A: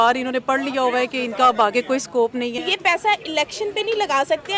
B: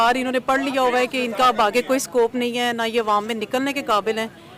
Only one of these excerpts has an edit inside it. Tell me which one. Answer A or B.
A